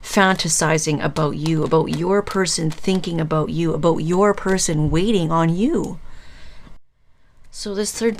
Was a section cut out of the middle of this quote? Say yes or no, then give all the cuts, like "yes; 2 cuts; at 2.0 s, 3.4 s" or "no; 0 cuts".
yes; 1 cut; at 6.8 s